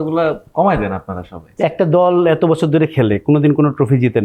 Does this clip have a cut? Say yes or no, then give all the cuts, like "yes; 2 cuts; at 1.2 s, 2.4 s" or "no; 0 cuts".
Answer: yes; 1 cut; at 1.4 s